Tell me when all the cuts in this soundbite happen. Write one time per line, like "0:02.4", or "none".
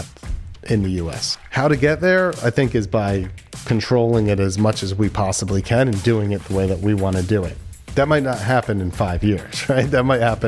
0:01.2